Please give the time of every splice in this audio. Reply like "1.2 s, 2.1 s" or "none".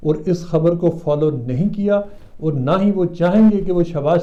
none